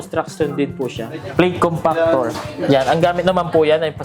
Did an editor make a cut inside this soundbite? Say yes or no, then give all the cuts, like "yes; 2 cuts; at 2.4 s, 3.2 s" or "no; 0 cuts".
yes; 1 cut; at 1.1 s